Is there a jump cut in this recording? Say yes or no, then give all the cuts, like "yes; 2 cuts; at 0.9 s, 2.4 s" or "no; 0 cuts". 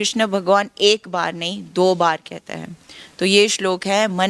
no; 0 cuts